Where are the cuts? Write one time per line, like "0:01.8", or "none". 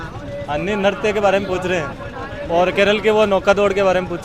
none